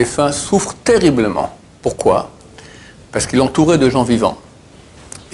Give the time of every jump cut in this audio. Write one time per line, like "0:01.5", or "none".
none